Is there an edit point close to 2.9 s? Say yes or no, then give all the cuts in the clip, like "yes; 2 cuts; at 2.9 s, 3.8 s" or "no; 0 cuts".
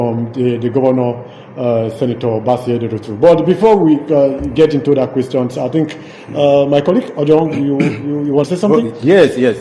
no; 1 cut; at 8.5 s